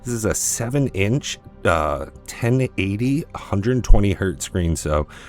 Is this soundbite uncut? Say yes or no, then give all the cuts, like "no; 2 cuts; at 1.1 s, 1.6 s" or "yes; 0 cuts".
yes; 0 cuts